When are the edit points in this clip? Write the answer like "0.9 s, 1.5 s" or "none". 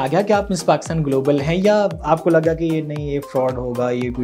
none

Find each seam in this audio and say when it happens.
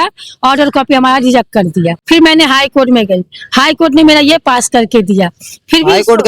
2.0 s

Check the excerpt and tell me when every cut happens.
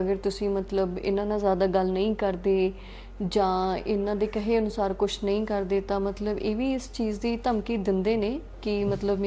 none

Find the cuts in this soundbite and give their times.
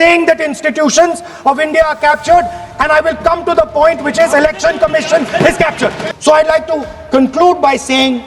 6.1 s

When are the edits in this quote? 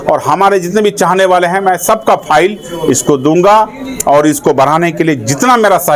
none

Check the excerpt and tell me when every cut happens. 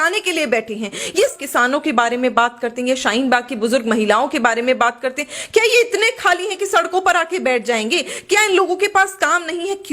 1.3 s

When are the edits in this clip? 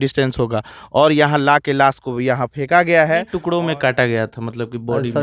3.5 s

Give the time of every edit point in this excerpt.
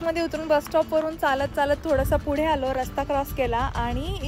none

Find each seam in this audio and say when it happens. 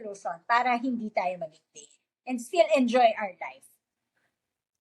none

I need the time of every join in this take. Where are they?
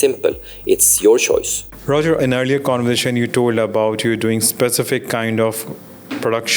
none

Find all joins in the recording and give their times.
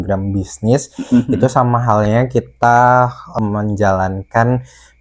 3.2 s

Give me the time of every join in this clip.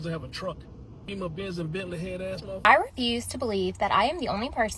1.0 s, 2.5 s

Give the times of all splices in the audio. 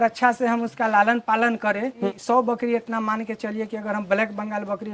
2.1 s

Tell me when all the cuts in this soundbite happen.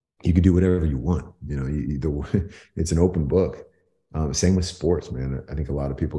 none

